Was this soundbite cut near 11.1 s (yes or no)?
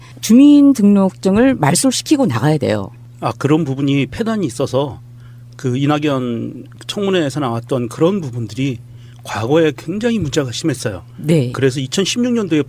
yes